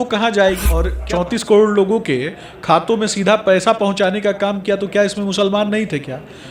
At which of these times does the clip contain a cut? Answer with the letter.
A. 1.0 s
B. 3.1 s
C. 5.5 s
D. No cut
A